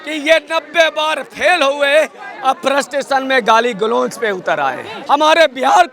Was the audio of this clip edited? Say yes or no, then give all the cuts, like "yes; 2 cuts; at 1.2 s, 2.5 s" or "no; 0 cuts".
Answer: yes; 1 cut; at 4.9 s